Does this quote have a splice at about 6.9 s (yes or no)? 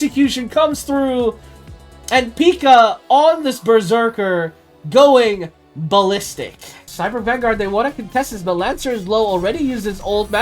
yes